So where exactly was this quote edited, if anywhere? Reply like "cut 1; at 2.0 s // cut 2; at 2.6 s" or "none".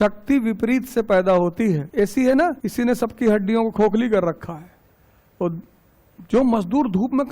cut 1; at 1.9 s // cut 2; at 2.6 s